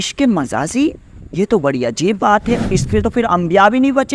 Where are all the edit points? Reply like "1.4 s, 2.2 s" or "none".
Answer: 2.7 s